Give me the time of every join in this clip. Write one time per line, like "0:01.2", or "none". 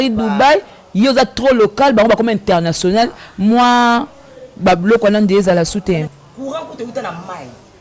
0:06.2